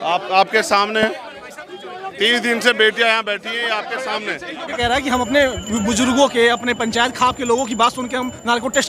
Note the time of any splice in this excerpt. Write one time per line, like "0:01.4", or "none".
0:04.8